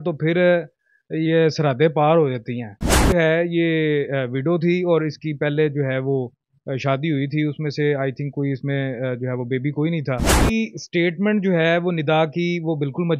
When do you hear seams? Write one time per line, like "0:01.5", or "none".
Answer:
0:03.1
0:10.5